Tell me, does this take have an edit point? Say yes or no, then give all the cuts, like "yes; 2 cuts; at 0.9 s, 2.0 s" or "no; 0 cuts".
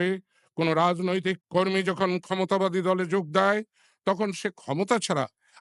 yes; 1 cut; at 1.4 s